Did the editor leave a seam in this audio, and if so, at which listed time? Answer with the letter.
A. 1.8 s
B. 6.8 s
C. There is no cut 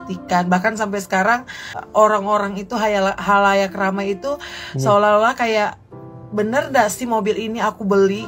A